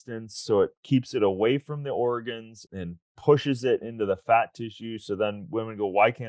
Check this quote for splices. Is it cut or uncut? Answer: cut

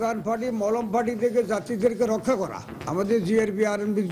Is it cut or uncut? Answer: uncut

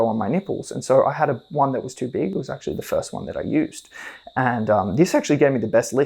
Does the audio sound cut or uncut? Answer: uncut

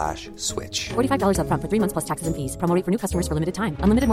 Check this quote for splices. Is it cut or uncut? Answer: uncut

